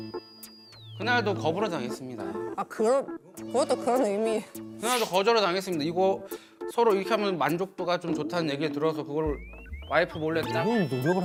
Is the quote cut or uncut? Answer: uncut